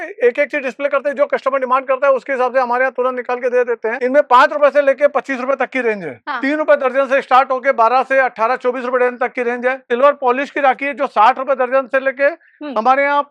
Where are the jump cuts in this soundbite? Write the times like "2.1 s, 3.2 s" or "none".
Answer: 4.0 s, 6.1 s, 9.8 s